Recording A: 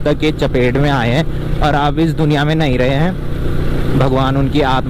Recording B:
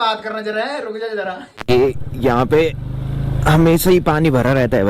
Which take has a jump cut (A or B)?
B